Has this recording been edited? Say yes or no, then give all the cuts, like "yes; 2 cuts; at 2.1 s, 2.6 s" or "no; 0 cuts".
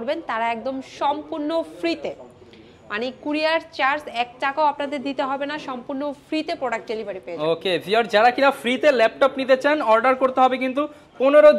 no; 0 cuts